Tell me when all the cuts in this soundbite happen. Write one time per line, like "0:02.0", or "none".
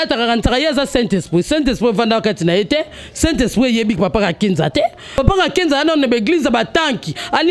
0:05.2